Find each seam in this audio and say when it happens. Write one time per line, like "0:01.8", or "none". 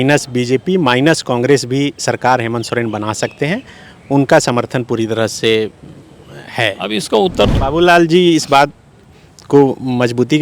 0:07.5

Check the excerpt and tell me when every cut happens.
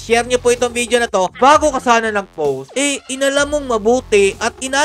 0:01.3
0:02.7

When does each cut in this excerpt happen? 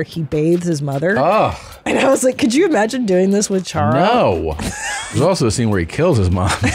0:05.2

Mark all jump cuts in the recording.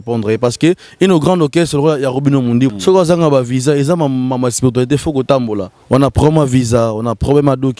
0:02.7
0:05.7

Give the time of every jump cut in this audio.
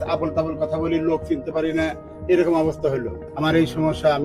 0:03.1

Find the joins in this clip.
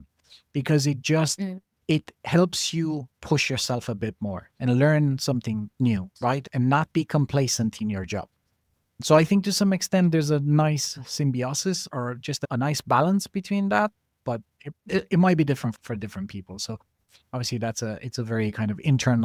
none

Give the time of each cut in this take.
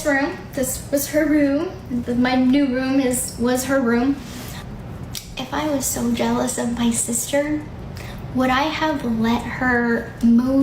0:04.6

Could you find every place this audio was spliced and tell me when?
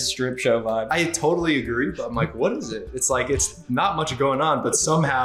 none

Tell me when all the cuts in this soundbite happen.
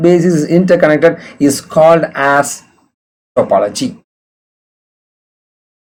none

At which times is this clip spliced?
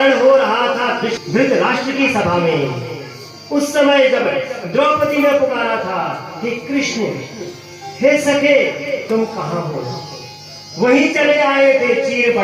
none

